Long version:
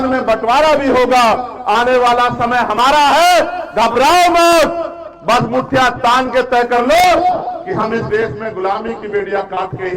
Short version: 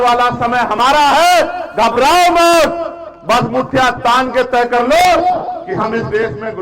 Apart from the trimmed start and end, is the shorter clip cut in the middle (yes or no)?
no